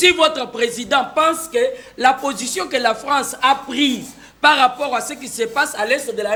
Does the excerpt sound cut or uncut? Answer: uncut